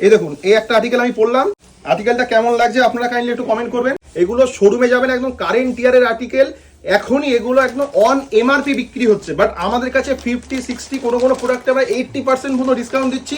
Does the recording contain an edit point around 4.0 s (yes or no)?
yes